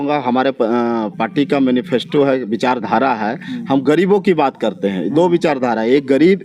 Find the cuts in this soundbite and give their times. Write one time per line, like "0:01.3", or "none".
none

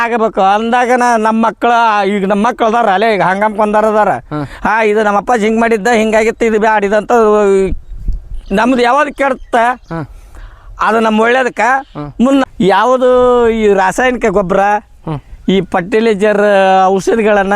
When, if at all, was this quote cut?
0:12.4

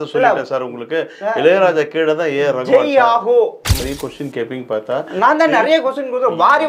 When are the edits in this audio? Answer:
0:03.8

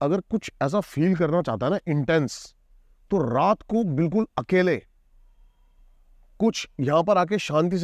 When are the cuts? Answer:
none

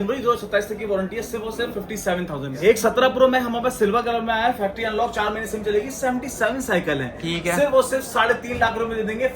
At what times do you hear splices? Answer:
0:02.5

